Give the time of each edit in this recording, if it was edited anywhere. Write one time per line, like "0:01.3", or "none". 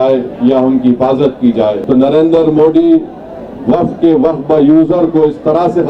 0:01.8